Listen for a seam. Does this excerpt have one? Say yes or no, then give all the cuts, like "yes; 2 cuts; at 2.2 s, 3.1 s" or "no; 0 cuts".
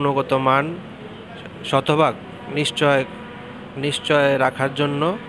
no; 0 cuts